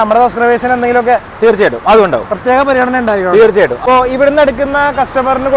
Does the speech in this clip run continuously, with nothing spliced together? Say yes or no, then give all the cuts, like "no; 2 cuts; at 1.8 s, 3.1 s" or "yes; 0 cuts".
no; 1 cut; at 3.8 s